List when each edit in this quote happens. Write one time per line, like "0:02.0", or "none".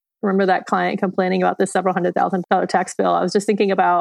0:02.4